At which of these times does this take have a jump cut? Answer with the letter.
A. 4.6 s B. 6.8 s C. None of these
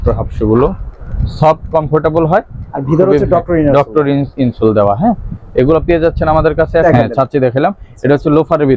B